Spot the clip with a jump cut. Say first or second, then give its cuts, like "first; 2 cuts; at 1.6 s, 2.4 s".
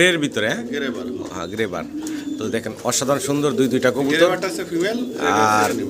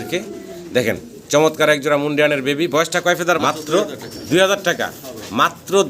second; 1 cut; at 3.4 s